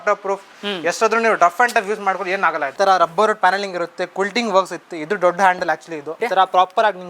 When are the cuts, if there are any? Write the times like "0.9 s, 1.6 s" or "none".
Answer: 2.7 s, 6.2 s